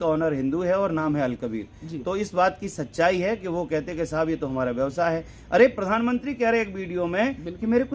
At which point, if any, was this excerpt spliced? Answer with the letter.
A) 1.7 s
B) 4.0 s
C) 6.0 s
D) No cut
D